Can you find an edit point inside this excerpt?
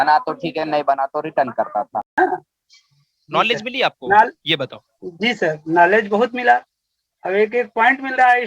yes; 1 cut; at 2.1 s

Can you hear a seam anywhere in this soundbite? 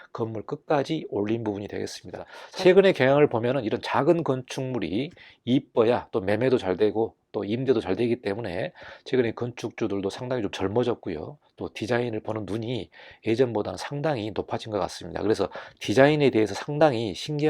yes; 1 cut; at 2.4 s

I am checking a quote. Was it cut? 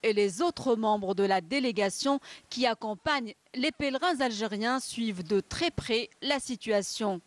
no; 0 cuts

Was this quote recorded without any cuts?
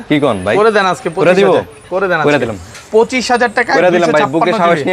yes; 0 cuts

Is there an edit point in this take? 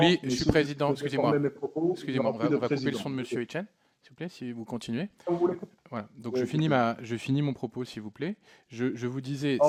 no; 0 cuts

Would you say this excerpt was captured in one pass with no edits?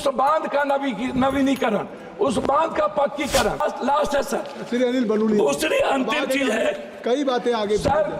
no; 1 cut; at 3.6 s

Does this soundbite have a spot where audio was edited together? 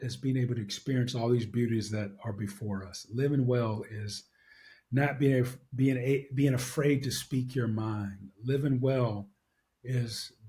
no; 0 cuts

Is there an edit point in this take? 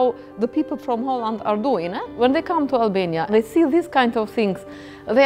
yes; 2 cuts; at 2.1 s, 3.3 s

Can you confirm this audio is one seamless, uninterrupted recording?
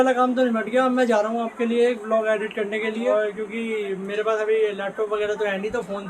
yes; 0 cuts

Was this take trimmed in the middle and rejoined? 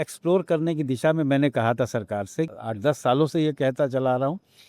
yes; 1 cut; at 2.5 s

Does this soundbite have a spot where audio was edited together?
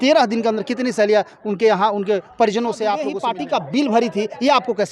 yes; 1 cut; at 3.3 s

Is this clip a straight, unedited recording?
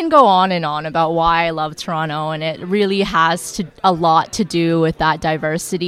yes; 0 cuts

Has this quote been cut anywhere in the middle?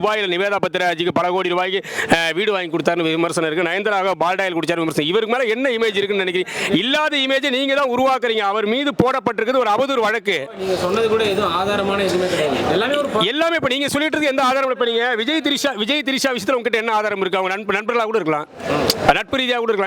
no; 0 cuts

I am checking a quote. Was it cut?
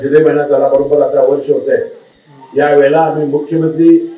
no; 0 cuts

